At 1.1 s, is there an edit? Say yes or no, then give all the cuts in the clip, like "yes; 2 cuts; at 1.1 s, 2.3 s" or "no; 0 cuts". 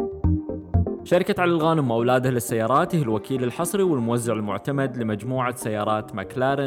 yes; 1 cut; at 1.1 s